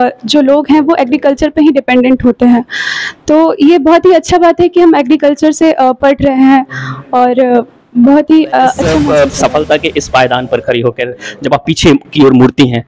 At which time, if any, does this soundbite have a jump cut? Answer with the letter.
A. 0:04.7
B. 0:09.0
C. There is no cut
B